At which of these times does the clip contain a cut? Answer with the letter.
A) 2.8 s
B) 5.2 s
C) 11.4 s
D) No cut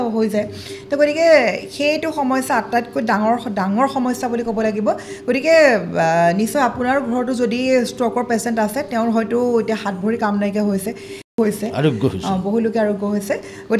C